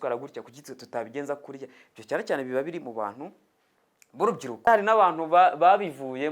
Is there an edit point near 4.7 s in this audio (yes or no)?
yes